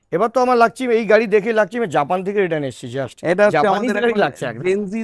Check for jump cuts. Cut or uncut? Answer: uncut